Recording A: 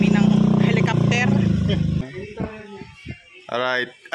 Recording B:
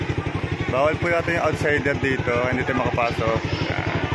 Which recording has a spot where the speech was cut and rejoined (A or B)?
A